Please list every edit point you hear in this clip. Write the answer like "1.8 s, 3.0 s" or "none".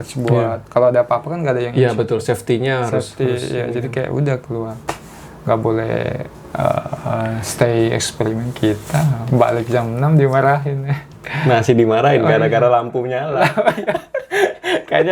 none